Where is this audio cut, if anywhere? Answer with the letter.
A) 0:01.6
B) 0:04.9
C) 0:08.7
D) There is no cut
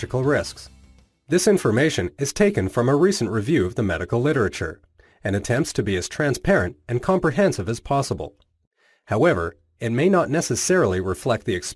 A